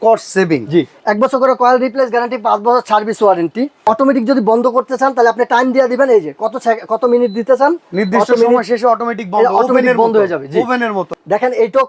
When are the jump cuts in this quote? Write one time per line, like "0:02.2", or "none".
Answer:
0:01.0
0:03.8
0:11.0